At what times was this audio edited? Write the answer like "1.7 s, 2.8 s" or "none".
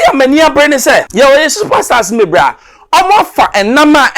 1.1 s